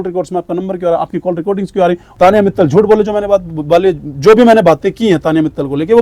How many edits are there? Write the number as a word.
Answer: one